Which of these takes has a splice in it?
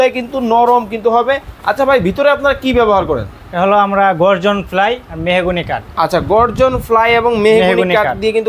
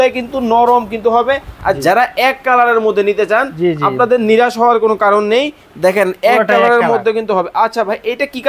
second; 1 cut; at 1.5 s

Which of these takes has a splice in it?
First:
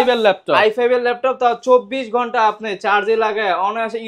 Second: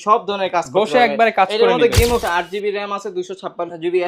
second; 1 cut; at 2.2 s

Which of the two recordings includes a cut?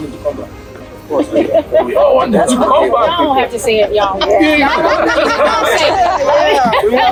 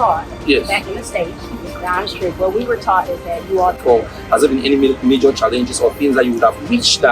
second; 1 cut; at 3.8 s

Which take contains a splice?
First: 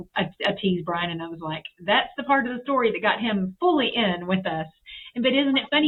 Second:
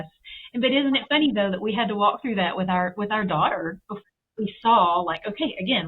second; 1 cut; at 4.1 s

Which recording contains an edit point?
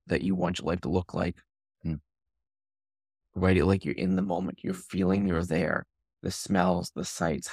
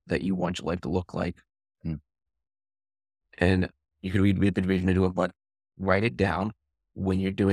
first; 1 cut; at 3.2 s

